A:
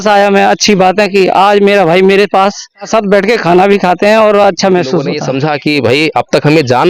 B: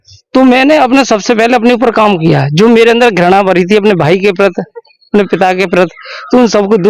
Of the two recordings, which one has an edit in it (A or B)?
A